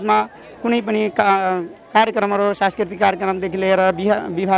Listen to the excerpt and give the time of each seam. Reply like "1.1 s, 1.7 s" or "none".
none